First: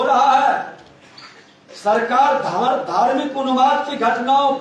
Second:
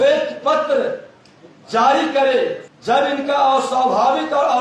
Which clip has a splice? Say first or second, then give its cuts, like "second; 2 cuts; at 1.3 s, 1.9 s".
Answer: second; 1 cut; at 2.7 s